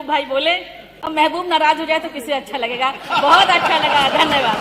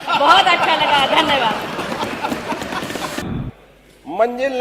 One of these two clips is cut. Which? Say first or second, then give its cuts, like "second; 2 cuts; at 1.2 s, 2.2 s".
second; 1 cut; at 3.2 s